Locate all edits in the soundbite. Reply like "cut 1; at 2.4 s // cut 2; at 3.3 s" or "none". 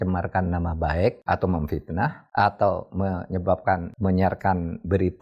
cut 1; at 1.2 s // cut 2; at 2.2 s // cut 3; at 3.9 s